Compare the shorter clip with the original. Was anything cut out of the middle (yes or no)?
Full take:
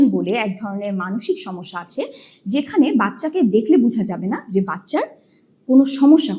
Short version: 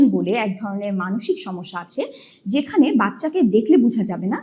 no